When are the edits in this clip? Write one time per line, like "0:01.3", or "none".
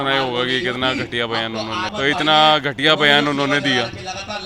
0:01.9

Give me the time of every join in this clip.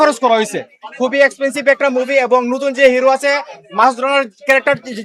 none

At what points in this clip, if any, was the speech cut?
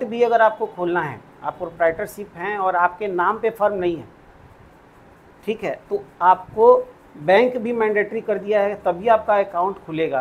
none

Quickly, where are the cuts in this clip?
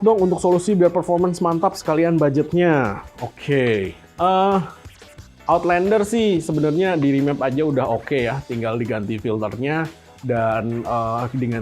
none

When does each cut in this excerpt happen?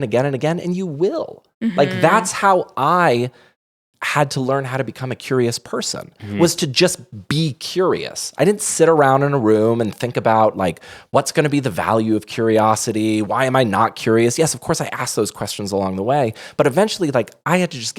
none

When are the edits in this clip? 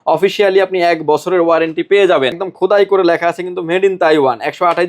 0:02.5

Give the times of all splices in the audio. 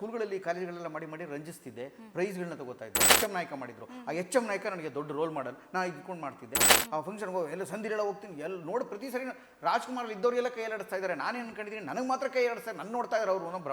0:03.1
0:06.7

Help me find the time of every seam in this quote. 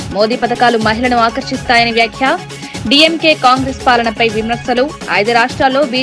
none

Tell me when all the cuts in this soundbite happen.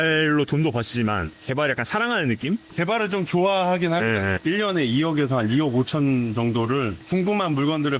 none

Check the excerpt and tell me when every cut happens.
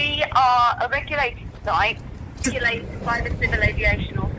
0:02.4

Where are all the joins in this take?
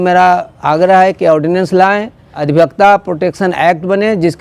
0:02.4

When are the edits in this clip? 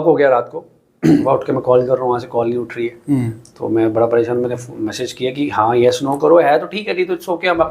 0:01.2

